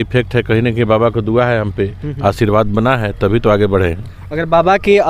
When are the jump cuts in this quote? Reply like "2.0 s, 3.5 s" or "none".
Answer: none